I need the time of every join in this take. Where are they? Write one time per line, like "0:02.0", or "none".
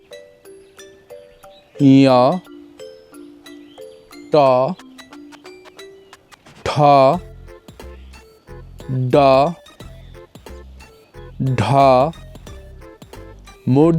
0:02.8
0:04.3
0:05.1
0:06.6
0:09.8
0:11.4